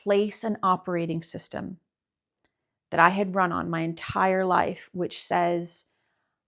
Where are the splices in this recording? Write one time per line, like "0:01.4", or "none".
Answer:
none